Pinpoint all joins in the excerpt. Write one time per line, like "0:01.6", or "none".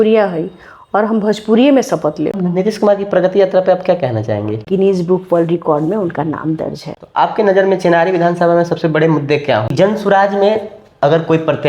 0:02.4
0:04.7
0:06.9
0:09.7